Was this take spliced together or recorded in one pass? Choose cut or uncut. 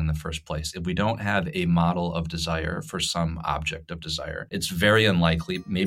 cut